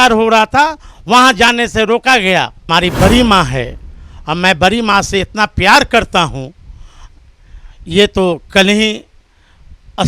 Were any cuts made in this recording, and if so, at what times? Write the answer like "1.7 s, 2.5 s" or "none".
2.6 s

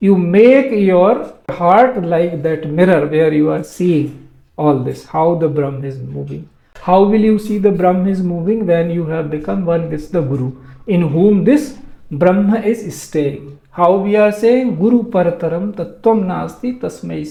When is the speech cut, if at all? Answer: none

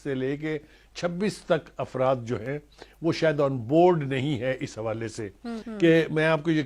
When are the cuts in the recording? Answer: 5.6 s

